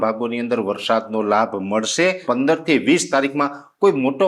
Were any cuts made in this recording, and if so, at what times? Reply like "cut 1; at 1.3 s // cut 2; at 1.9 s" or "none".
cut 1; at 2.2 s